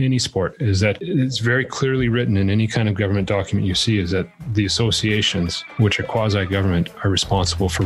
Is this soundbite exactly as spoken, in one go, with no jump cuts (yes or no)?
yes